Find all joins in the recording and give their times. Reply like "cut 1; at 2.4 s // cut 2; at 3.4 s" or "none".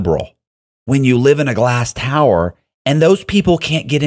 none